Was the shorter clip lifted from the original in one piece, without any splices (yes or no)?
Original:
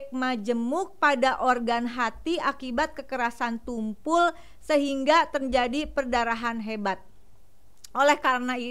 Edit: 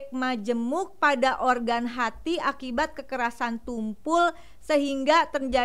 yes